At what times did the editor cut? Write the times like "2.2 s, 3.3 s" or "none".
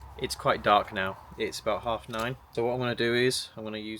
2.4 s